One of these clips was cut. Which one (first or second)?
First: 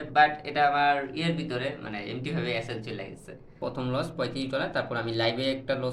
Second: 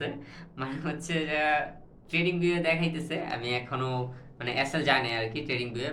first